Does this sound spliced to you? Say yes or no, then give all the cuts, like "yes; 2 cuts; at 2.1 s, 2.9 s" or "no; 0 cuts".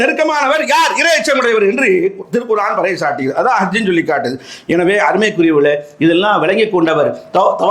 no; 0 cuts